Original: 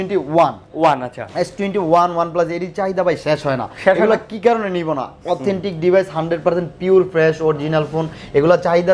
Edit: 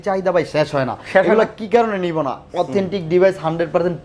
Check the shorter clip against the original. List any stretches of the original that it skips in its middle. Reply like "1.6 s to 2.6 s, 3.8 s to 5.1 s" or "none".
none